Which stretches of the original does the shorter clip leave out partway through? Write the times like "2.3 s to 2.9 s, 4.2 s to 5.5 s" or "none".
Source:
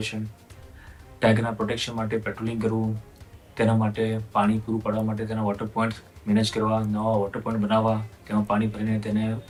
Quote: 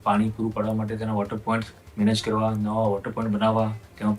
none